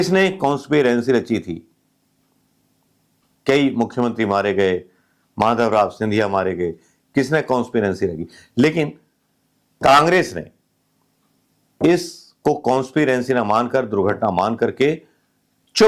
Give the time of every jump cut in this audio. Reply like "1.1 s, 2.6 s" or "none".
none